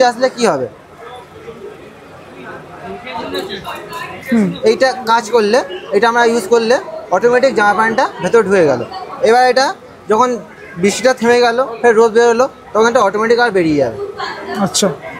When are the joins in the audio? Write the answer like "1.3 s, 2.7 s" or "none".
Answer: none